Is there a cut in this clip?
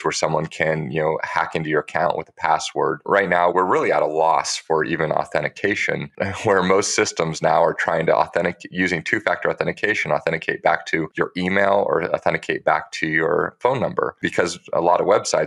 yes; 3 cuts; at 3.0 s, 6.1 s, 11.1 s

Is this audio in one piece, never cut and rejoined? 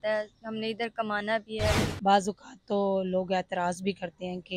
no; 1 cut; at 1.9 s

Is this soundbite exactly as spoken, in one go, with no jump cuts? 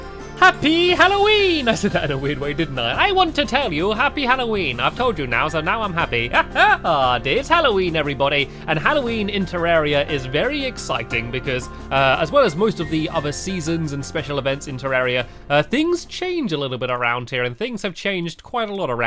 no; 1 cut; at 10.3 s

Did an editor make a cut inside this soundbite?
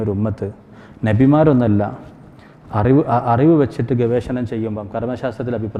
no; 0 cuts

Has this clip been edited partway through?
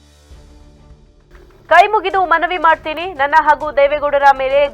yes; 1 cut; at 1.2 s

